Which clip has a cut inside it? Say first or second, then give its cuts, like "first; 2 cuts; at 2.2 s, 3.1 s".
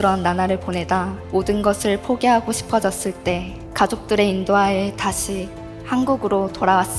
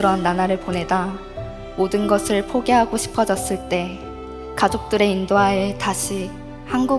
first; 2 cuts; at 1.2 s, 3.6 s